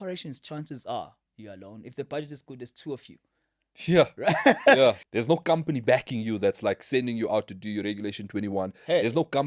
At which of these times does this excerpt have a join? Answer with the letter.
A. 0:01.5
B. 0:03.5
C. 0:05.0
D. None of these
C